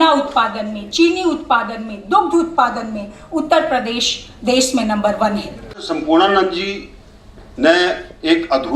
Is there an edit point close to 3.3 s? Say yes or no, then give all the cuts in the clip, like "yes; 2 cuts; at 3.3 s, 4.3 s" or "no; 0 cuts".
no; 1 cut; at 5.8 s